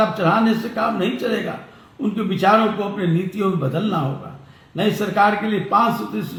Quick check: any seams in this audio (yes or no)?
no